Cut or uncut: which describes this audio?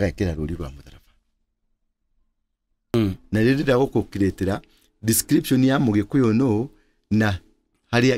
cut